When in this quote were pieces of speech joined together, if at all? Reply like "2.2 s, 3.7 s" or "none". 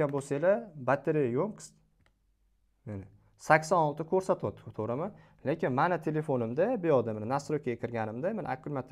none